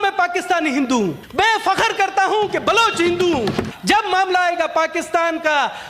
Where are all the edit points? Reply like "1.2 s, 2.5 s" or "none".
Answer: 1.2 s, 3.7 s